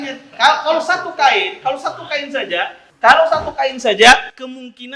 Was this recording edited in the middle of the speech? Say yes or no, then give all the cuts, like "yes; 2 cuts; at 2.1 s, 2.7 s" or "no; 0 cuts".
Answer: yes; 1 cut; at 2.8 s